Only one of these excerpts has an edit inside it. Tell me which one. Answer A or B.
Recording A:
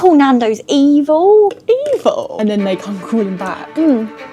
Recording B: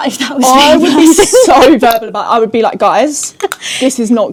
A